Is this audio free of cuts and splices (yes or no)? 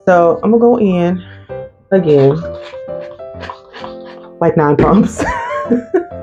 yes